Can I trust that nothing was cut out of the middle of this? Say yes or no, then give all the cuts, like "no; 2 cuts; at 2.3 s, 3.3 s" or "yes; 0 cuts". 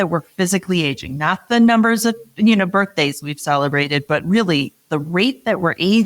yes; 0 cuts